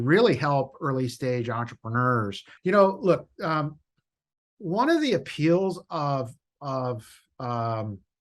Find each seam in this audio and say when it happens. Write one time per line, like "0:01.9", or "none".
0:02.4